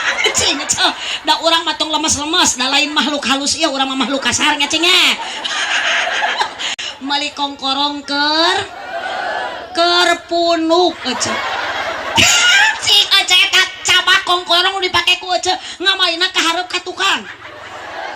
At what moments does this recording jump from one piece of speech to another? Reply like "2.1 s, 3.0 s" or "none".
6.8 s